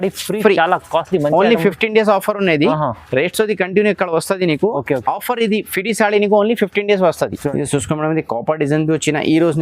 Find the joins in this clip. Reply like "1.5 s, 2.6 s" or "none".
7.4 s